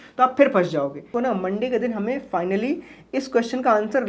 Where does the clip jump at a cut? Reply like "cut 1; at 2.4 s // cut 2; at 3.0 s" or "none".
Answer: cut 1; at 1.1 s